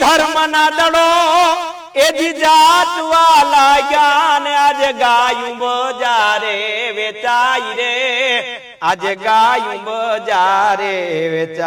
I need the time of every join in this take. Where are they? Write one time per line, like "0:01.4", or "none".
none